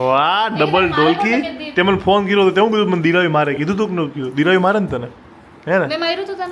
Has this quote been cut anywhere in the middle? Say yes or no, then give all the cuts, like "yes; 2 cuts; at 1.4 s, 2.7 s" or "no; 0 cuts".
no; 0 cuts